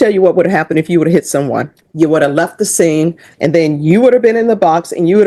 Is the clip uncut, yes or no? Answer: no